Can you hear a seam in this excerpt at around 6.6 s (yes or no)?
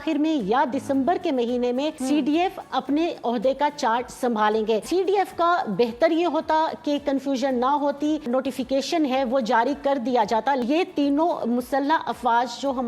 no